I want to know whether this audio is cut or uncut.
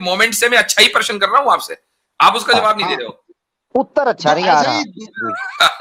uncut